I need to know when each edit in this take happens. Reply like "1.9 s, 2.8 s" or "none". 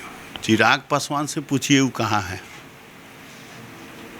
none